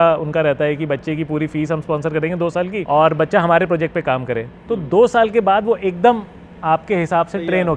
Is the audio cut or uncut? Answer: cut